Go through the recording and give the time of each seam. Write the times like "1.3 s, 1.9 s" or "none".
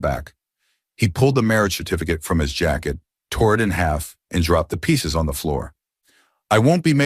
none